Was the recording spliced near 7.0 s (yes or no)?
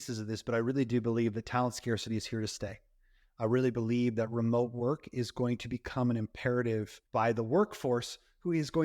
yes